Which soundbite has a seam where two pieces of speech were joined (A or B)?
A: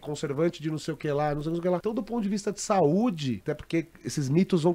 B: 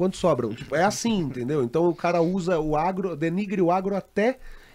A